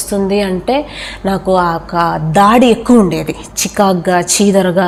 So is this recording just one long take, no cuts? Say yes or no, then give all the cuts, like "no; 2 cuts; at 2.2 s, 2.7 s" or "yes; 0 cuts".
yes; 0 cuts